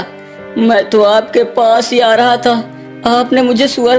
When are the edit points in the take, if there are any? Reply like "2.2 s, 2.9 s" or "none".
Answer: none